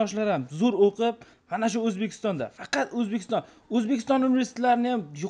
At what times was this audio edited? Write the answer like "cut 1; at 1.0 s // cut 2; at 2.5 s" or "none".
none